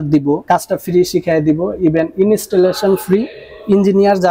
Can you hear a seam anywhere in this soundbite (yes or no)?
no